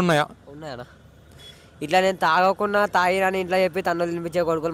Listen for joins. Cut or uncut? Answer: uncut